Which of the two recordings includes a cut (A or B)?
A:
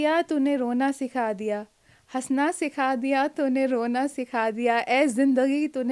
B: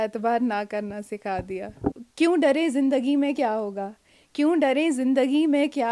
B